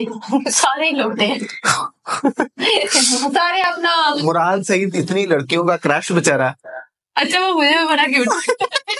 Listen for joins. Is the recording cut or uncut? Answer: uncut